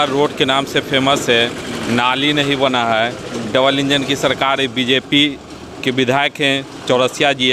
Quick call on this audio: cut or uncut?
uncut